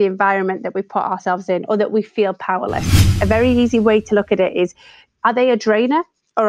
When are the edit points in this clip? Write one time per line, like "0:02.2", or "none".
0:03.1
0:05.1